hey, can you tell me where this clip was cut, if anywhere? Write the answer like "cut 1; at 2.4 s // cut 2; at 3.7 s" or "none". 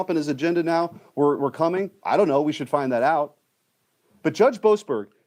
none